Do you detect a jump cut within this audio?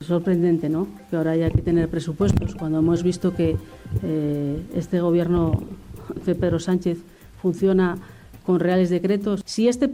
no; 0 cuts

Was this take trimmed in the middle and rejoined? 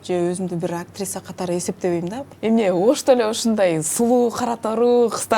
yes; 1 cut; at 2.2 s

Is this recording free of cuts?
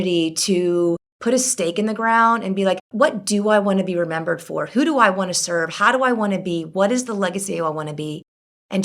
no; 2 cuts; at 1.1 s, 2.8 s

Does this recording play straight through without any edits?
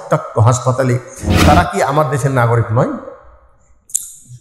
no; 1 cut; at 1.3 s

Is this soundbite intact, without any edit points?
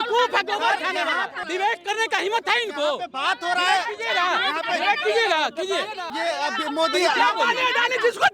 no; 2 cuts; at 1.3 s, 6.0 s

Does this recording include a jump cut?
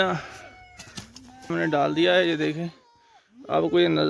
yes; 1 cut; at 1.5 s

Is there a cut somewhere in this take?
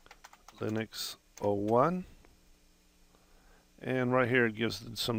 no; 0 cuts

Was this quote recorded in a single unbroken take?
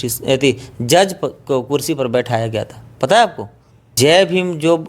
no; 1 cut; at 3.9 s

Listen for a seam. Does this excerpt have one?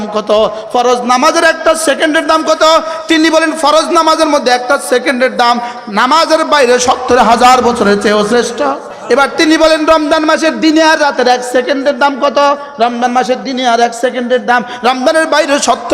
yes; 1 cut; at 8.9 s

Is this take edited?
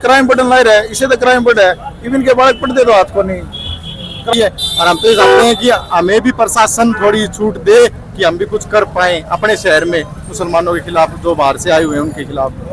yes; 1 cut; at 4.3 s

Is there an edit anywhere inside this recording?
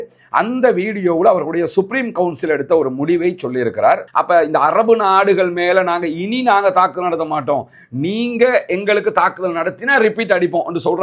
yes; 1 cut; at 4.1 s

